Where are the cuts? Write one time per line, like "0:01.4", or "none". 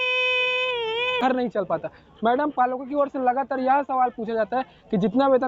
0:01.2